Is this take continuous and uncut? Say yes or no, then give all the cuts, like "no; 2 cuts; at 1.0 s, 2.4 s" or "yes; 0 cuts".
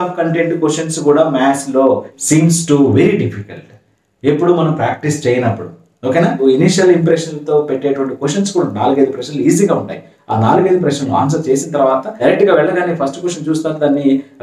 no; 3 cuts; at 2.1 s, 6.4 s, 12.1 s